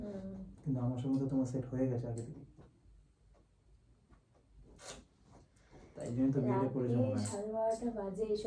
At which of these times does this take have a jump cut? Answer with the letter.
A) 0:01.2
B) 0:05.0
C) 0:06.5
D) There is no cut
D